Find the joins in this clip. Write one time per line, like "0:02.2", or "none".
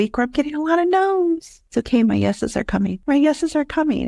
0:01.5
0:03.0